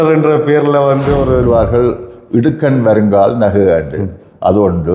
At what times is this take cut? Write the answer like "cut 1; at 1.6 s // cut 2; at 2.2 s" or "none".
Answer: cut 1; at 1.4 s